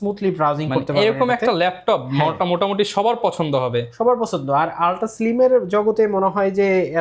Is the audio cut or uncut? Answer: uncut